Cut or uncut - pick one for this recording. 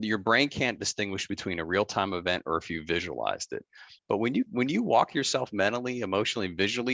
cut